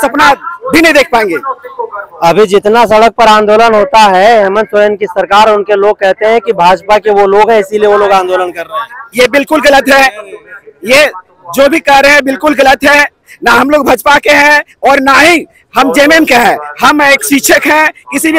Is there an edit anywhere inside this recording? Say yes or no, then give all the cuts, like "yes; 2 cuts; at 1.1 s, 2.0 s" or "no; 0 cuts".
no; 0 cuts